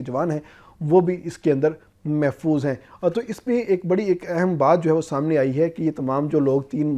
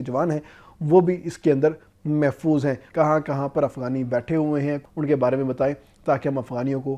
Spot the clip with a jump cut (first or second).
second